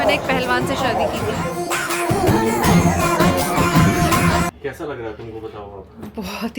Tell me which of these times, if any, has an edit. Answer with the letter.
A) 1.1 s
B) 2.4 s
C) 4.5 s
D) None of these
C